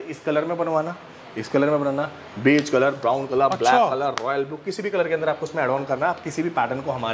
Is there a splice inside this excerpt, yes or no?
no